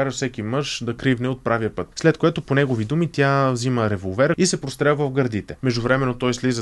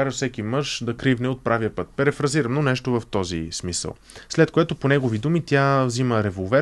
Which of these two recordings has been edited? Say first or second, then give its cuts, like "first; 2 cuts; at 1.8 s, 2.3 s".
first; 3 cuts; at 1.8 s, 4.4 s, 5.5 s